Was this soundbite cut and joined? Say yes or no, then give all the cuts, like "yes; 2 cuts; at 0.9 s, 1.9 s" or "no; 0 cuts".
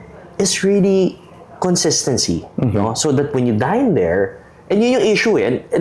no; 0 cuts